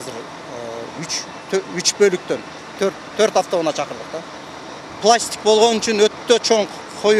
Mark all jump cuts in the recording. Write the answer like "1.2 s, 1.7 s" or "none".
5.0 s